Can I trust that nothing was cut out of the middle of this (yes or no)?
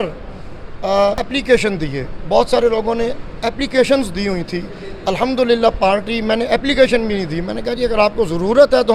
no